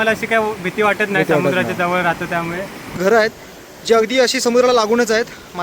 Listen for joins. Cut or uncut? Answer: cut